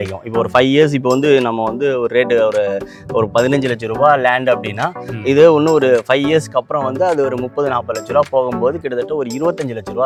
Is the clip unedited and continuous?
yes; 0 cuts

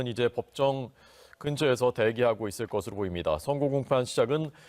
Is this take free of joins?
no; 1 cut; at 1.5 s

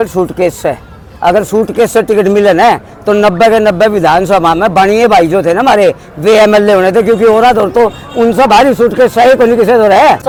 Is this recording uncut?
yes; 0 cuts

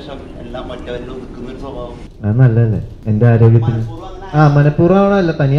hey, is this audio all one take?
no; 2 cuts; at 2.1 s, 2.9 s

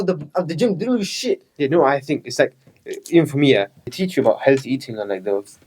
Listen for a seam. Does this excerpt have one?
yes; 1 cut; at 3.8 s

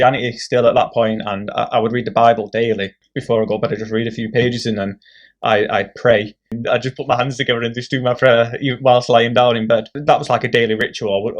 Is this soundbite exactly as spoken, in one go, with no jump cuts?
no; 3 cuts; at 3.1 s, 6.5 s, 10.0 s

